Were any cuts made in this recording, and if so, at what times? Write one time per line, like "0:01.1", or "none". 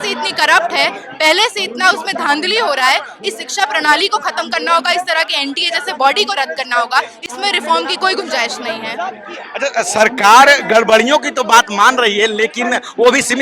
none